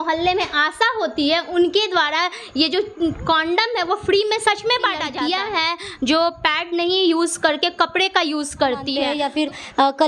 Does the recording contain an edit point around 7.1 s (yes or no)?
no